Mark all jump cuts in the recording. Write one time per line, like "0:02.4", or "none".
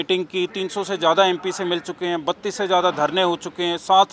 none